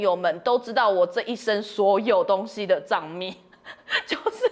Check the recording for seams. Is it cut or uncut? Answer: uncut